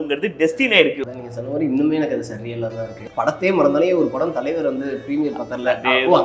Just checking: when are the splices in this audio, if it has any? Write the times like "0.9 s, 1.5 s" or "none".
1.0 s, 3.0 s